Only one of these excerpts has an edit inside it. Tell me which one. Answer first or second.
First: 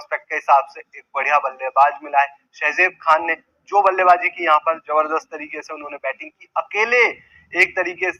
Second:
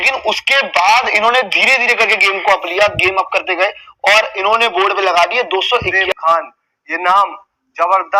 second